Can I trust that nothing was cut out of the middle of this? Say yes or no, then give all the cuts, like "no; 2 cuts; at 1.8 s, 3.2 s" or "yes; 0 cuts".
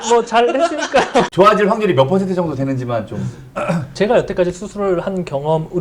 no; 2 cuts; at 1.3 s, 3.9 s